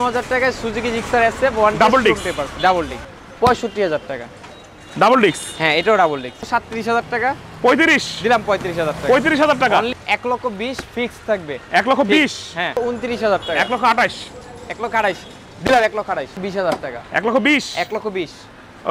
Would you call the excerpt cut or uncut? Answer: cut